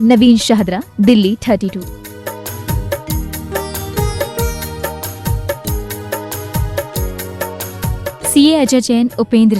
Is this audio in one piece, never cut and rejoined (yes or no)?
yes